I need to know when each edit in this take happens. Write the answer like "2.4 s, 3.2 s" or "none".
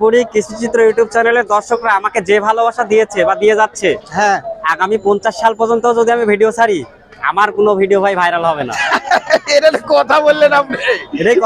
none